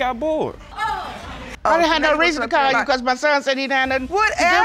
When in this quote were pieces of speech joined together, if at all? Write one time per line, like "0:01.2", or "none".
0:01.5